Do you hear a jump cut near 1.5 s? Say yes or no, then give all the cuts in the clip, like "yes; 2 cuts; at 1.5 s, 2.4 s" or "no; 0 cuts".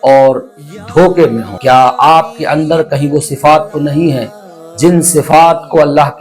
yes; 1 cut; at 1.5 s